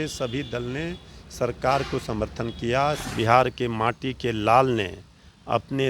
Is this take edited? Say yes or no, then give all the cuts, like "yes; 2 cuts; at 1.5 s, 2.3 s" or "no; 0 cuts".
yes; 1 cut; at 3.0 s